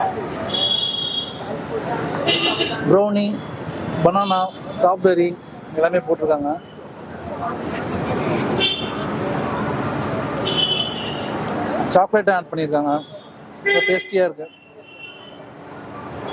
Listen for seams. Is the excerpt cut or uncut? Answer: uncut